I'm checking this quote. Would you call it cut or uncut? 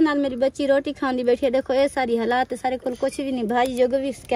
uncut